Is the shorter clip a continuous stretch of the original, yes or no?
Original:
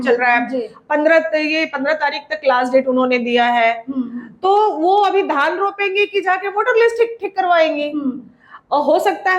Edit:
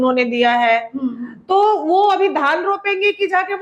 yes